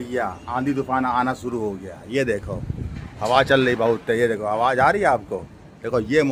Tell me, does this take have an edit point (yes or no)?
no